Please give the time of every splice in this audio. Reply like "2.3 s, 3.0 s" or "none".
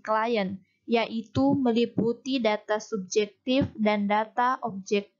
2.4 s